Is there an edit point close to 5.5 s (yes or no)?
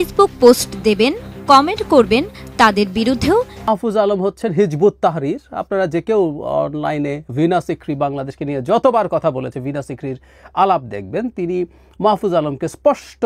no